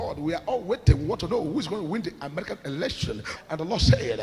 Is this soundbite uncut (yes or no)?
no